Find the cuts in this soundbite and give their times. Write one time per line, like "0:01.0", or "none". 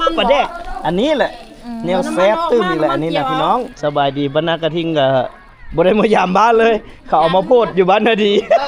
0:03.7